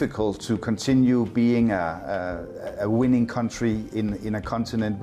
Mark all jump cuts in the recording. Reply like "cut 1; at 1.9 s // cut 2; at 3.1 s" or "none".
none

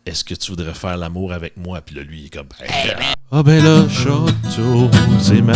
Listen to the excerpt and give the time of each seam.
cut 1; at 3.1 s

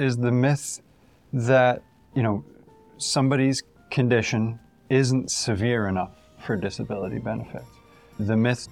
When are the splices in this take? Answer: none

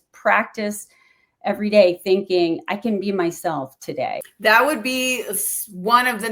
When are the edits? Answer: cut 1; at 4.2 s

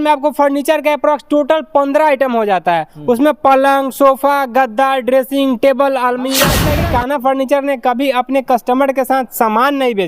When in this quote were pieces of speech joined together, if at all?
cut 1; at 6.7 s

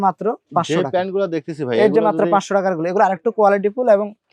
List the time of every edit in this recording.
none

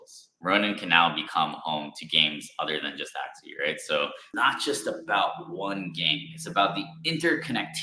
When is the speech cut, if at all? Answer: cut 1; at 4.3 s

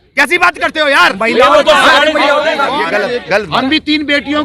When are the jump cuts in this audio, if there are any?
cut 1; at 2.8 s

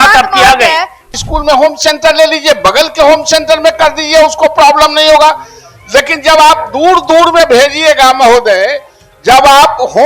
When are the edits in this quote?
cut 1; at 1.1 s

